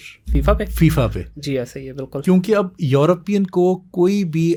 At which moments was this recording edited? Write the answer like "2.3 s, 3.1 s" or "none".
none